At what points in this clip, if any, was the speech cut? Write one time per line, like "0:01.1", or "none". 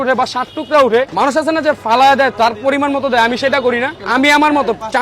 0:01.1
0:04.0